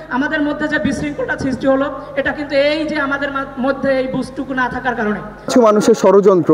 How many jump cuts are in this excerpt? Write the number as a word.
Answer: one